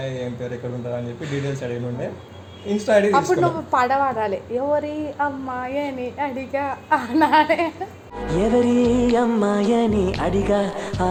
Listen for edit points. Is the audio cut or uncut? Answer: uncut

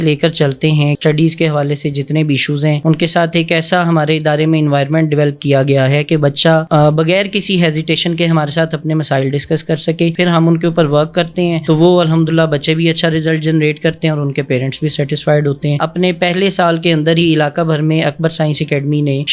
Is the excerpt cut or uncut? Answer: cut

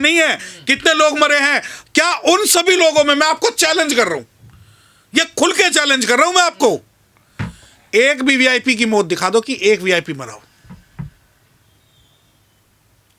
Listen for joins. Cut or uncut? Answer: uncut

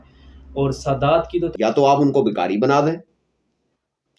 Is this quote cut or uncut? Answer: cut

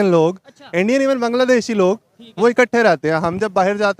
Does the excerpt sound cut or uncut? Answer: uncut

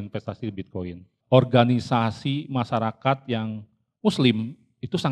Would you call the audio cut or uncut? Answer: cut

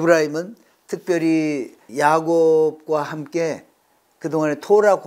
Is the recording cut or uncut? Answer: cut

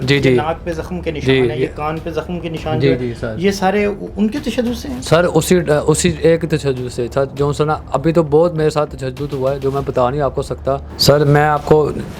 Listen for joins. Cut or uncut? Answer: cut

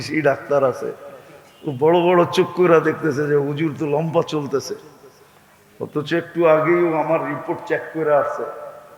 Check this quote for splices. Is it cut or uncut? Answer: uncut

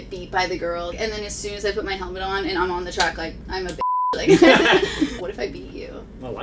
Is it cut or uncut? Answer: cut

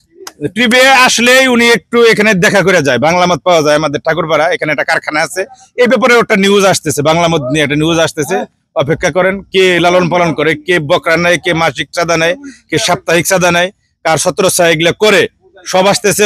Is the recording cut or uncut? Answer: uncut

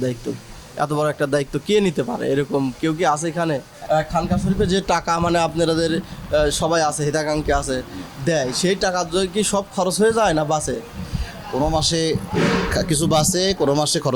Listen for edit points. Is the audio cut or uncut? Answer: cut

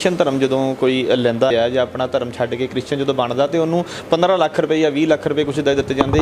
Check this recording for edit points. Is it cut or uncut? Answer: cut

